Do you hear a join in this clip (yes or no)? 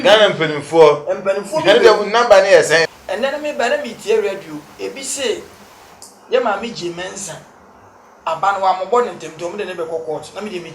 yes